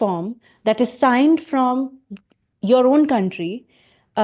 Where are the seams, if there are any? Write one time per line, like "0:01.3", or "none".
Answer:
none